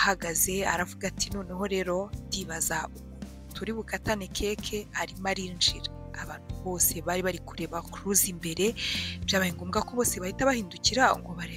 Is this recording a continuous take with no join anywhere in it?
yes; 0 cuts

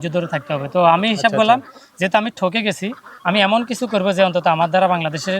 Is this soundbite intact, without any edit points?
yes; 0 cuts

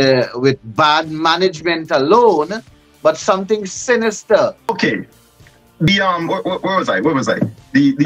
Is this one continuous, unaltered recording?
no; 1 cut; at 4.6 s

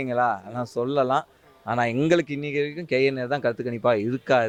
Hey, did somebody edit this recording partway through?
no; 0 cuts

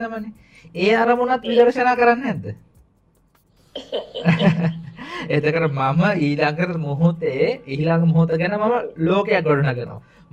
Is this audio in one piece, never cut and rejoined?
yes; 0 cuts

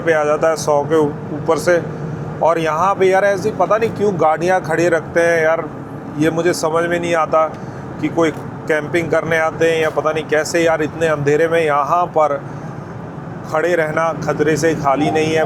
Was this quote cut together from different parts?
no; 0 cuts

